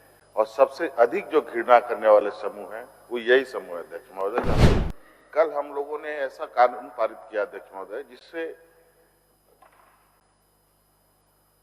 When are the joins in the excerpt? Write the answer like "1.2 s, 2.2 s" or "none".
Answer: 4.6 s